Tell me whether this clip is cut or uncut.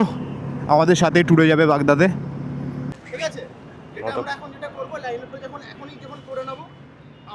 cut